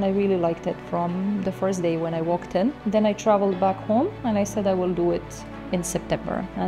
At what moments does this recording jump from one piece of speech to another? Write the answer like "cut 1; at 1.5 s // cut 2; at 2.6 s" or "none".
cut 1; at 2.8 s